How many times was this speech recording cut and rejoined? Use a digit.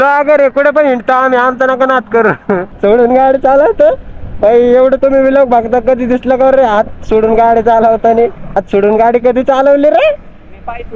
2